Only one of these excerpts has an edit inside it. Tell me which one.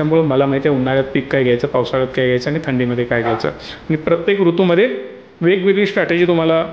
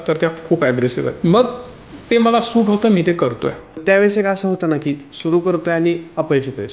second; 2 cuts; at 1.1 s, 3.7 s

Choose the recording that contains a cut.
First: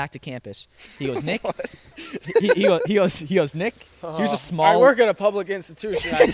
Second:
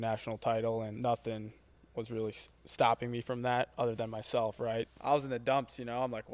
second; 2 cuts; at 1.0 s, 4.9 s

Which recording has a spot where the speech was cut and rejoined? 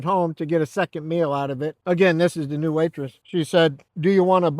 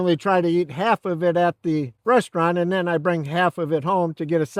first; 1 cut; at 1.8 s

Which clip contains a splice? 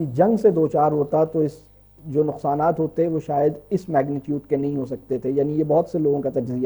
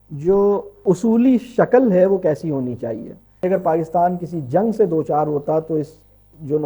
second; 2 cuts; at 0.8 s, 3.4 s

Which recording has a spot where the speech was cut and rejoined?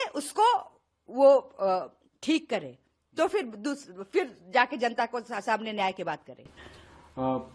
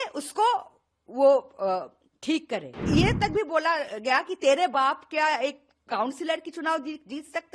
second; 1 cut; at 2.7 s

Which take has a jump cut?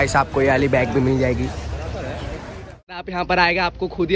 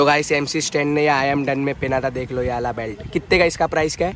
first; 1 cut; at 3.1 s

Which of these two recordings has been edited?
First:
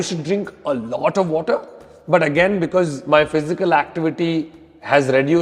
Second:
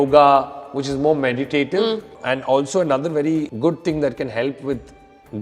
second; 2 cuts; at 2.1 s, 3.5 s

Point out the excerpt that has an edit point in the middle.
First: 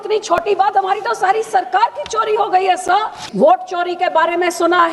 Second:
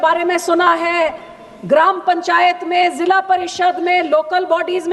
first; 1 cut; at 3.2 s

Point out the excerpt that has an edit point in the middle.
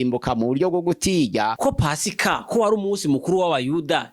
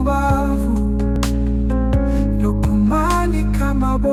first; 1 cut; at 1.6 s

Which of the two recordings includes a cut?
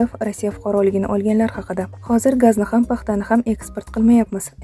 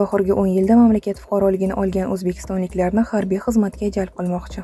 first; 1 cut; at 1.9 s

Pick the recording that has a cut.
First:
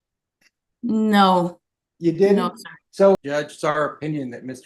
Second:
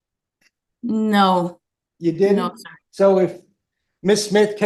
first; 1 cut; at 3.2 s

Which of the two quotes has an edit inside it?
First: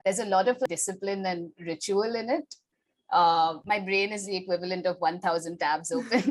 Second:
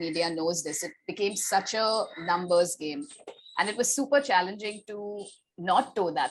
first; 2 cuts; at 0.7 s, 3.6 s

